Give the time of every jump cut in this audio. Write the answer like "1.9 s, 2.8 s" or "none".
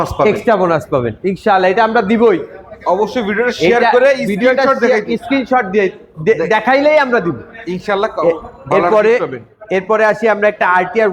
none